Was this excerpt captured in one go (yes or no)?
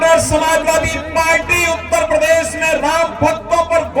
yes